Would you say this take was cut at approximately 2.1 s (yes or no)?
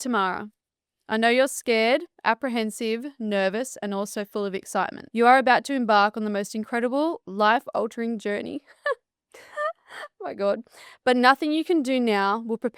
no